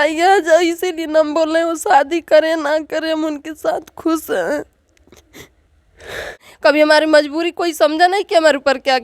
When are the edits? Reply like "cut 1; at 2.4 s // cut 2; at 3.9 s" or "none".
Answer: cut 1; at 6.4 s